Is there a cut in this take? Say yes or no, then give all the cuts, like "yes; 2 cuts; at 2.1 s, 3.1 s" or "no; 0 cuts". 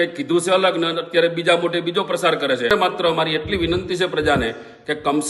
yes; 1 cut; at 2.7 s